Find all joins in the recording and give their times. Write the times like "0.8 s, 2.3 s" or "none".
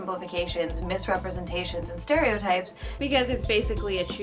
2.9 s

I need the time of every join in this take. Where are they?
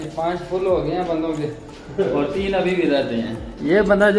none

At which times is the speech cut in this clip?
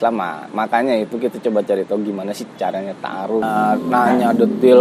3.5 s

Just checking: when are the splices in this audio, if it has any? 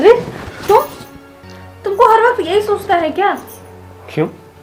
none

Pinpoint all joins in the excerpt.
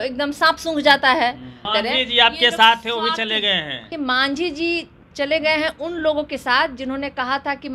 1.6 s, 3.9 s

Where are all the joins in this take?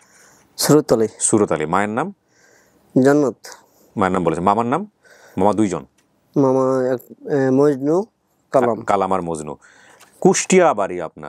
none

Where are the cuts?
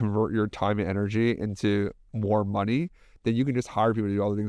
none

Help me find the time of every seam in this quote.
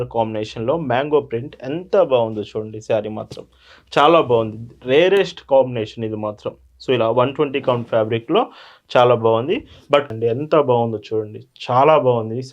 10.1 s

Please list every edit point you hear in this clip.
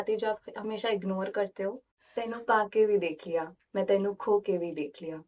2.0 s

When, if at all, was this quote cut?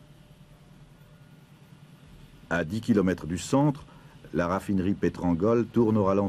2.2 s

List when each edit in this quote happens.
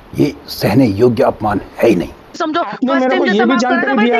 2.4 s

